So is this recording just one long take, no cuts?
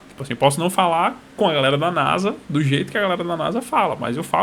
yes; 0 cuts

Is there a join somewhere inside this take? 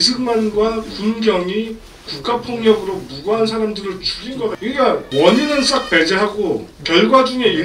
yes; 1 cut; at 4.8 s

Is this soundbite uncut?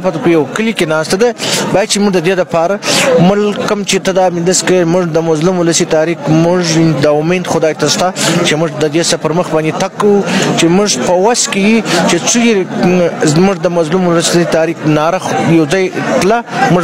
yes; 0 cuts

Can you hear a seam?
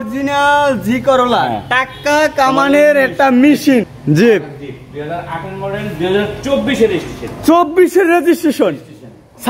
yes; 1 cut; at 3.9 s

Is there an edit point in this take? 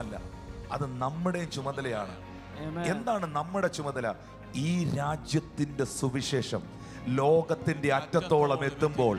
no; 0 cuts

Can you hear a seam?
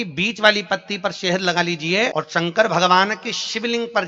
yes; 1 cut; at 2.1 s

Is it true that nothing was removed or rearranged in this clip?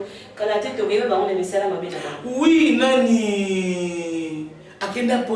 yes; 0 cuts

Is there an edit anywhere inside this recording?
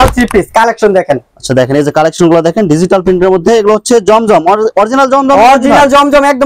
no; 0 cuts

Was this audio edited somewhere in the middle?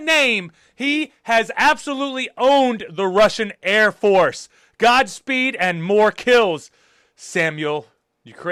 no; 0 cuts

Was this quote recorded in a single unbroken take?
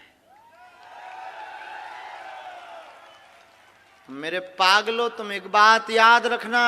yes; 0 cuts

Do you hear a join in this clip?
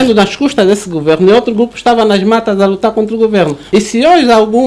yes; 1 cut; at 3.6 s

